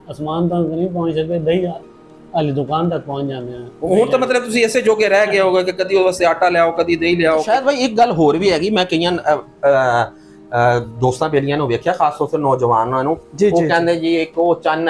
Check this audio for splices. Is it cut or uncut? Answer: uncut